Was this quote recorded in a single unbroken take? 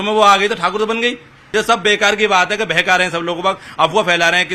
no; 1 cut; at 1.3 s

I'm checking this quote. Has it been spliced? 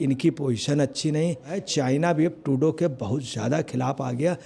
yes; 1 cut; at 1.6 s

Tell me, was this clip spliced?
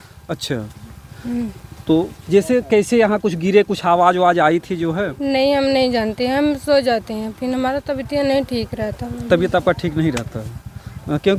no; 0 cuts

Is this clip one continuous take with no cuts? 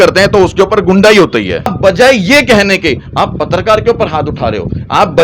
no; 1 cut; at 1.8 s

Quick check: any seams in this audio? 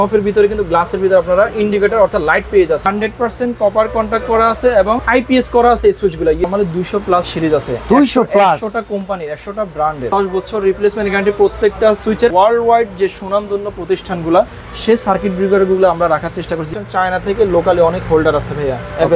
yes; 6 cuts; at 2.8 s, 5.0 s, 6.4 s, 10.0 s, 12.3 s, 16.7 s

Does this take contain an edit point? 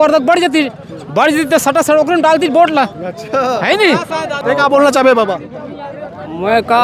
yes; 1 cut; at 4.3 s

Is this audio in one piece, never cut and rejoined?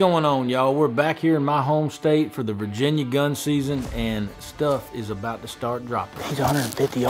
no; 1 cut; at 6.1 s

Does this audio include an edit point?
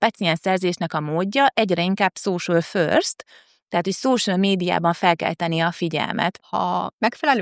yes; 1 cut; at 6.4 s

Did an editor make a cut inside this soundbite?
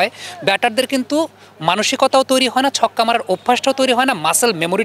no; 0 cuts

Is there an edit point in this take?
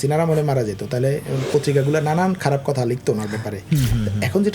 no; 0 cuts

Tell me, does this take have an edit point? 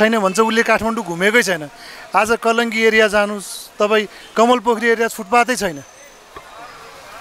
no; 0 cuts

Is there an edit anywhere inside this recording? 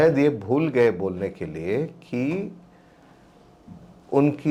no; 0 cuts

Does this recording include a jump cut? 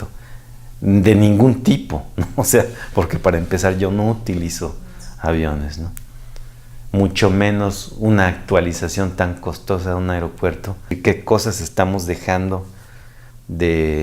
yes; 1 cut; at 11.0 s

